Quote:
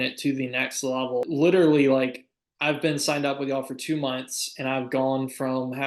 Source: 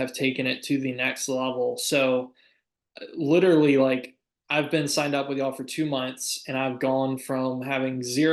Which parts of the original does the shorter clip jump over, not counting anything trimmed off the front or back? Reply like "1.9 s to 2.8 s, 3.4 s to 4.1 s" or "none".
1.7 s to 3.1 s